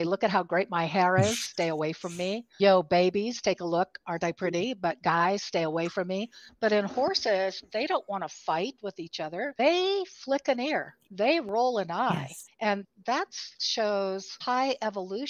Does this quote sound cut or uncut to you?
cut